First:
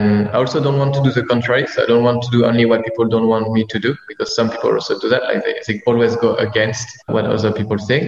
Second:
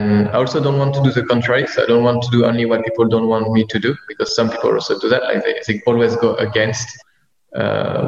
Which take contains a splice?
first; 1 cut; at 7.1 s

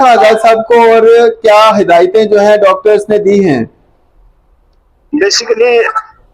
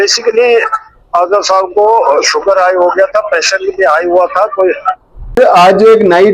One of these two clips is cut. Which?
second; 1 cut; at 5.4 s

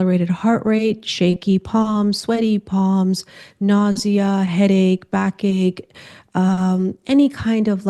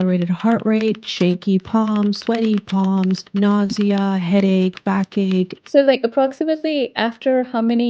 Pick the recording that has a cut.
second; 2 cuts; at 3.2 s, 5.7 s

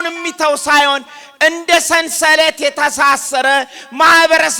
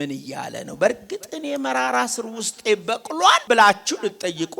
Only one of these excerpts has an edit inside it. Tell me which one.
second; 1 cut; at 3.4 s

